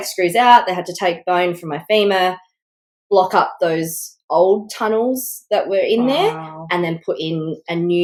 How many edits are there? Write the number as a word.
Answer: zero